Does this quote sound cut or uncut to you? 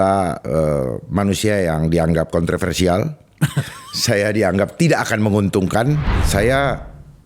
cut